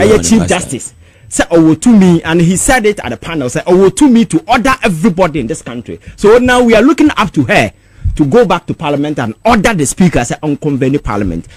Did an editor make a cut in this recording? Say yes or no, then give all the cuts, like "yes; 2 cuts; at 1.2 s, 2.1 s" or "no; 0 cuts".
no; 0 cuts